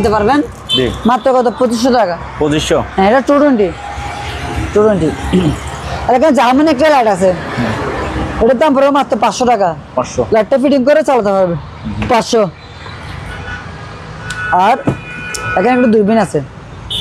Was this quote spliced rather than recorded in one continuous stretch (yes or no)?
no